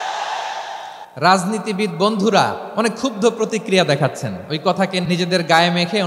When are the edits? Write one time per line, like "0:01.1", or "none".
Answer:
0:01.0
0:02.6
0:05.0